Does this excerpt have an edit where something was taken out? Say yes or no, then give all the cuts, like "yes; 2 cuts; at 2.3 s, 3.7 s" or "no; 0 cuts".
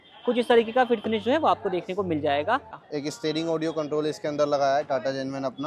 yes; 1 cut; at 2.8 s